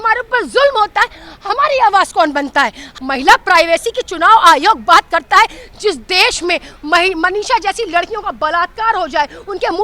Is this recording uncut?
no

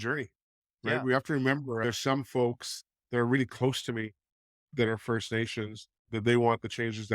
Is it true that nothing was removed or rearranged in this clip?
no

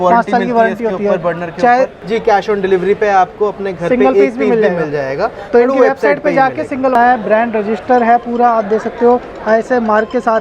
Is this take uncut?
no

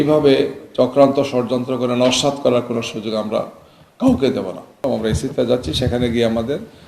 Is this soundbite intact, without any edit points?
no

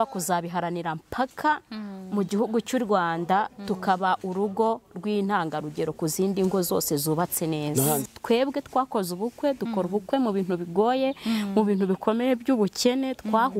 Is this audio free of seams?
no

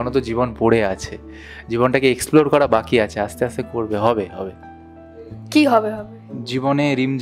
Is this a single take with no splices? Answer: yes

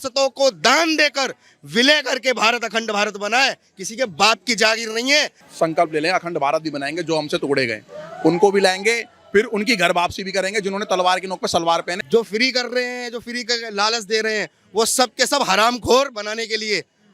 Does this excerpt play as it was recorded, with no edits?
no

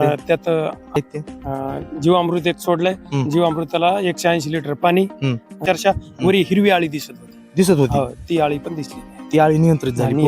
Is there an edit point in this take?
yes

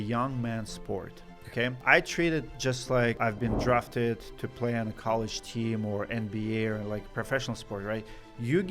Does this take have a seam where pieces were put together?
yes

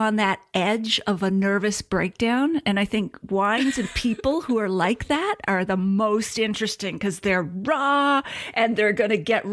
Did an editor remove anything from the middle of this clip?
no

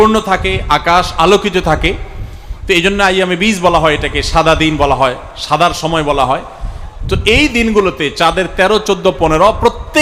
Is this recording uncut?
yes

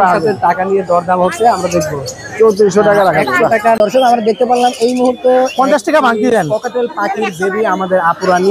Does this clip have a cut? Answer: yes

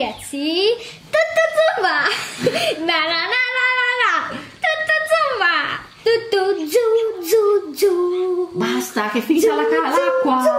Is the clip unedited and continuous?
no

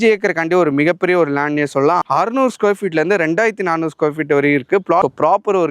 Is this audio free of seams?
no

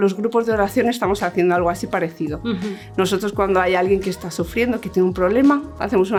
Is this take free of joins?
yes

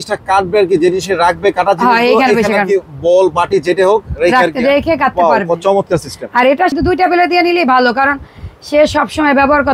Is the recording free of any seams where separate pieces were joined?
no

